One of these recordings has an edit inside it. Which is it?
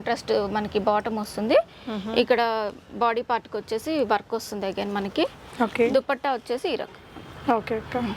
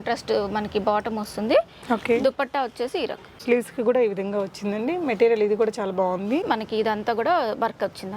second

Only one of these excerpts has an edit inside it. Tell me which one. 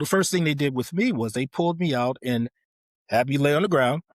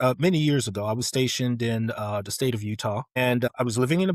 second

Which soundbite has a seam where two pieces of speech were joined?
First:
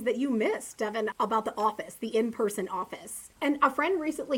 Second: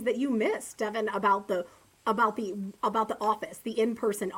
first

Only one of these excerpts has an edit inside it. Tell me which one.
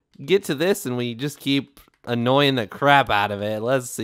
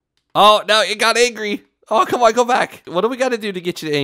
second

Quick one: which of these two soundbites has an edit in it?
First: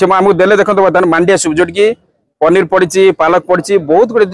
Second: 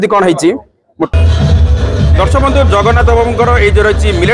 second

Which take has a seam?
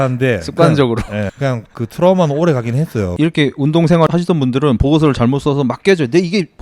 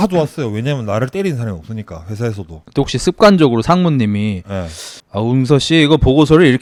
first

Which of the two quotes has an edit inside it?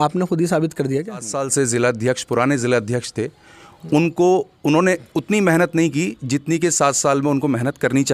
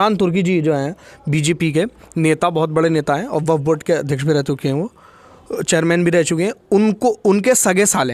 first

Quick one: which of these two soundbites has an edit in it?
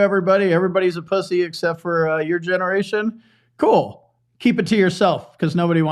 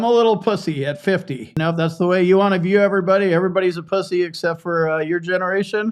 second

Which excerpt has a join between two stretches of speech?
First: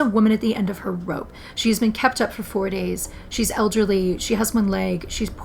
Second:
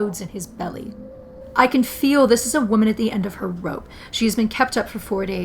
second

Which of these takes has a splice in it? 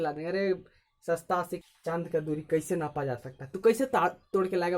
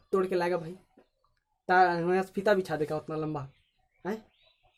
first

